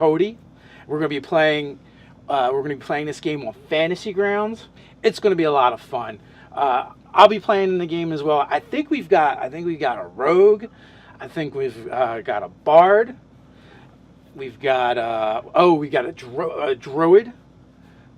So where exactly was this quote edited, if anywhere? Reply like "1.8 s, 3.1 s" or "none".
11.8 s